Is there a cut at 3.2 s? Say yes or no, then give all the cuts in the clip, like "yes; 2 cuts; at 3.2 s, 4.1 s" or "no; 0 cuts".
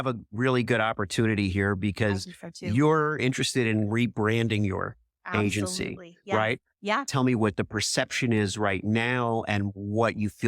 yes; 2 cuts; at 3.2 s, 7.1 s